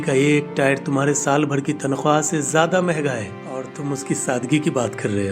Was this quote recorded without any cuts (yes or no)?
no